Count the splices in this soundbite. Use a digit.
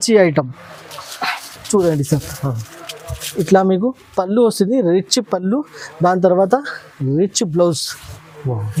0